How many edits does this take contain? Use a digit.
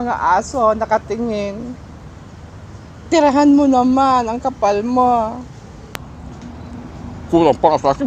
1